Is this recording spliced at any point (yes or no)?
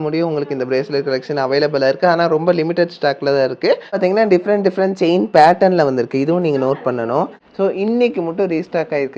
yes